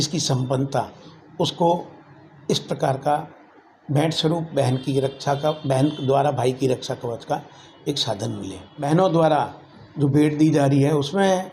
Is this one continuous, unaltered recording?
no; 1 cut; at 8.7 s

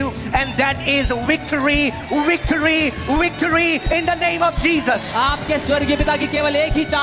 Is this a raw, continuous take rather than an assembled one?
yes; 0 cuts

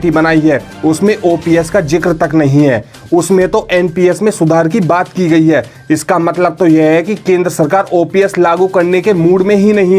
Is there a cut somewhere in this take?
no; 0 cuts

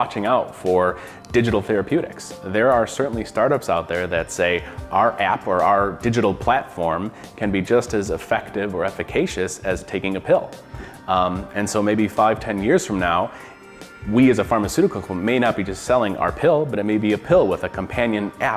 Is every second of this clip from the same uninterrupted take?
yes; 0 cuts

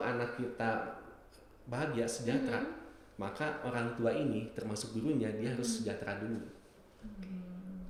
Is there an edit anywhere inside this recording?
no; 0 cuts

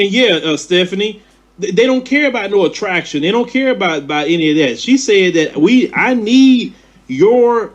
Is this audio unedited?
yes; 0 cuts

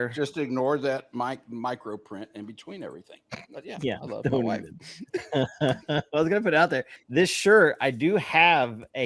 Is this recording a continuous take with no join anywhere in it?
no; 1 cut; at 6.9 s

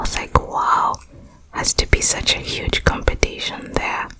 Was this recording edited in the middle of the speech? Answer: no; 0 cuts

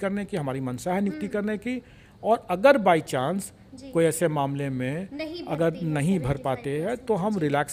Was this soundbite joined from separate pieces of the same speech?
no; 0 cuts

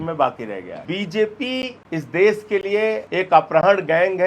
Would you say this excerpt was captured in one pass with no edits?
no; 3 cuts; at 0.8 s, 1.8 s, 3.0 s

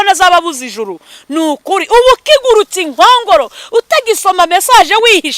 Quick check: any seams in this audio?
no; 0 cuts

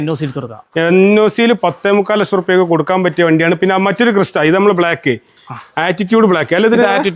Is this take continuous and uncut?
yes; 0 cuts

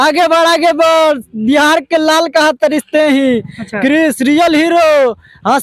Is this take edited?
no; 0 cuts

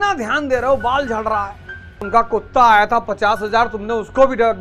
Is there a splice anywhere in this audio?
yes; 1 cut; at 2.0 s

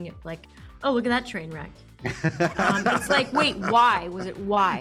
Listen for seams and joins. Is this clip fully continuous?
yes; 0 cuts

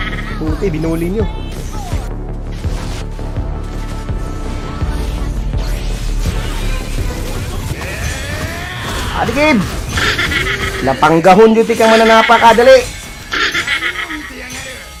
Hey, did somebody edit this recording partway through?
no; 0 cuts

